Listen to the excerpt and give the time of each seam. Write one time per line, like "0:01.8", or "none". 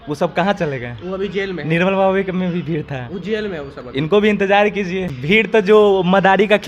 0:05.1